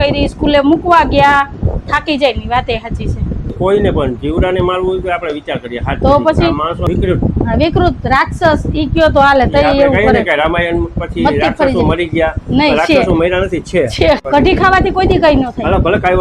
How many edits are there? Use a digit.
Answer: 3